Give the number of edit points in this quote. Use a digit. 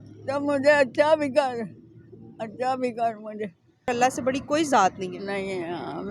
1